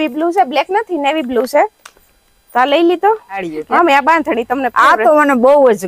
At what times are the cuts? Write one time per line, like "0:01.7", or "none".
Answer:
0:03.5